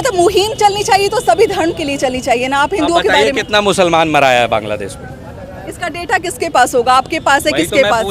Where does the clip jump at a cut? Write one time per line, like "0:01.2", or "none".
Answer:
none